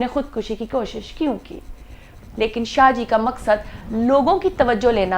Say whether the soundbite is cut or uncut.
cut